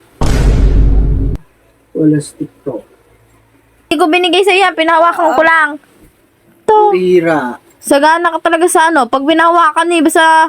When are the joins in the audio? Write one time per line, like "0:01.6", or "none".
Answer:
0:03.9